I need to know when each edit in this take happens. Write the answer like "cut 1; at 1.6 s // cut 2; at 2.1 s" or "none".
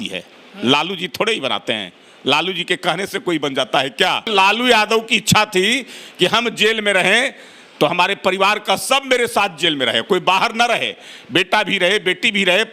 cut 1; at 4.3 s